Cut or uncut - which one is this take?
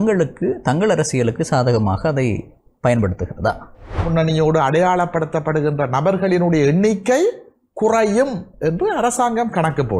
cut